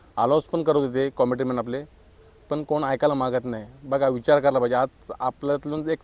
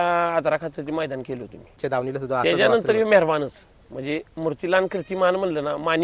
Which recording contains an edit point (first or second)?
second